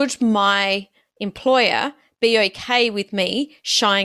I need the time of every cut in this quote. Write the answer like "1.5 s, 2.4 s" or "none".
none